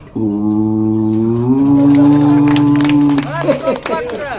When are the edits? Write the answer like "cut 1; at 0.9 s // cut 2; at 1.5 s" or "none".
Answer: none